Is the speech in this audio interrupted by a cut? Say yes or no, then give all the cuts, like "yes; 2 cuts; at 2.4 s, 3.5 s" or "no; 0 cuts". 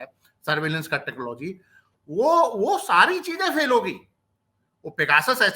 no; 0 cuts